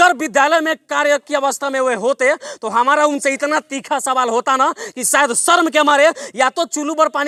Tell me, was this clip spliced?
no; 0 cuts

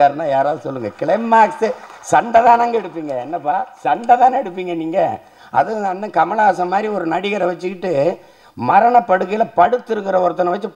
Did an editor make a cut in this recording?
no; 0 cuts

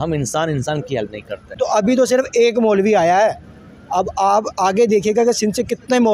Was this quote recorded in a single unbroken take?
no; 1 cut; at 1.4 s

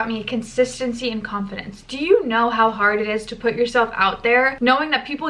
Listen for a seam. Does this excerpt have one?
no; 0 cuts

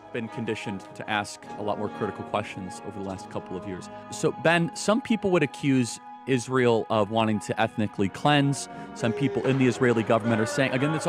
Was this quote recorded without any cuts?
yes; 0 cuts

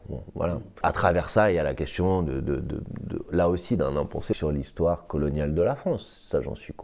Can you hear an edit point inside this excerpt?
yes; 2 cuts; at 0.8 s, 4.3 s

